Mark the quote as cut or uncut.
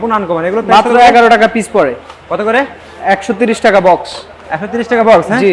uncut